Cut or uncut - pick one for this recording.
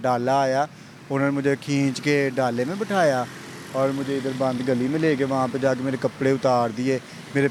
uncut